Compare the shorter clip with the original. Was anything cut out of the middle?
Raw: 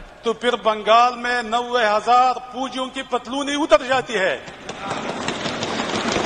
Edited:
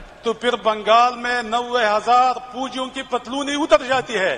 no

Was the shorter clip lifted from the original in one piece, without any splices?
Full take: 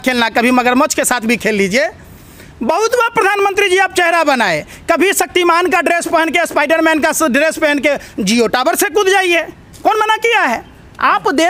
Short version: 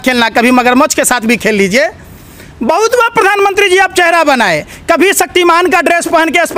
yes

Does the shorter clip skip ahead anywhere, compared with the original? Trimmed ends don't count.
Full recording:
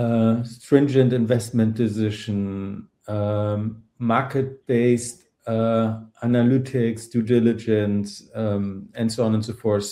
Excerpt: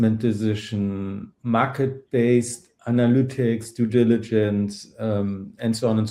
yes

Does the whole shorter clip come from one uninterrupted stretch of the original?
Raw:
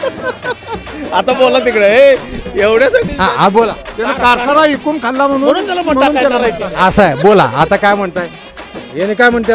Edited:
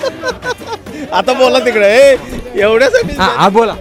yes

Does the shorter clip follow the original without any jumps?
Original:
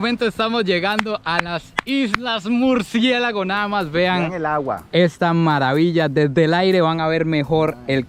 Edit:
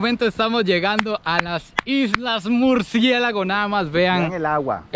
yes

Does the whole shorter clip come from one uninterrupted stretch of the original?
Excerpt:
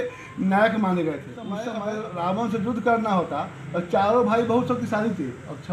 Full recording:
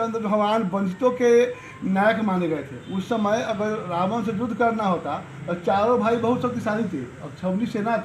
no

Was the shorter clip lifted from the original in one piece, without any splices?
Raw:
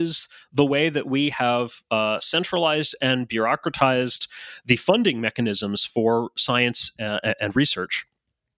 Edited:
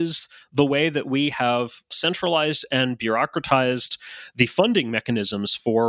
no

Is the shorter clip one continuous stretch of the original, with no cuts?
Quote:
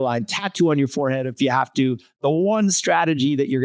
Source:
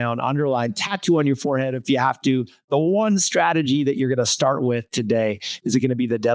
yes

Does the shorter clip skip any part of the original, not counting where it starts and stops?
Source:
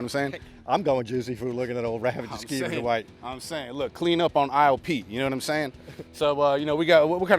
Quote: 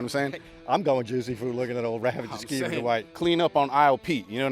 yes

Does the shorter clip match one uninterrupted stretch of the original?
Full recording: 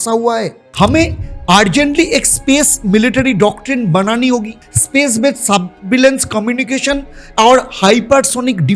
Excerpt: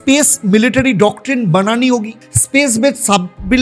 yes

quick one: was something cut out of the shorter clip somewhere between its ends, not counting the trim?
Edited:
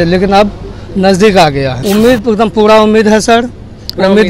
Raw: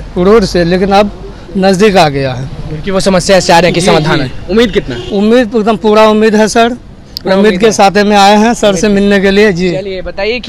yes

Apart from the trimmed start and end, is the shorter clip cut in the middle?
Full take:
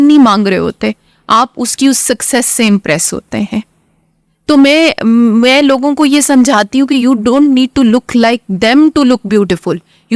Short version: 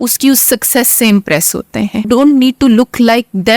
yes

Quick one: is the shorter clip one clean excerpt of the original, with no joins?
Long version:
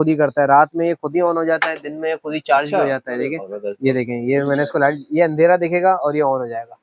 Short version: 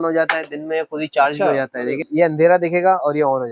no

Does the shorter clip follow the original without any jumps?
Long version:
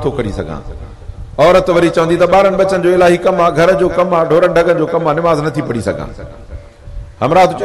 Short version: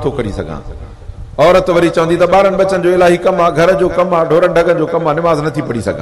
yes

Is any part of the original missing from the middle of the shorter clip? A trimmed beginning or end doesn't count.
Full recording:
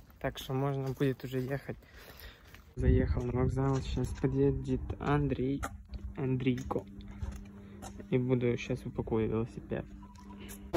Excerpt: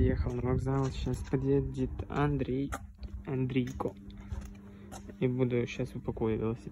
no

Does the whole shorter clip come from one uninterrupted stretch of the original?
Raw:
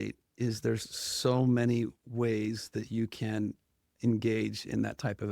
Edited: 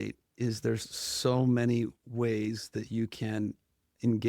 yes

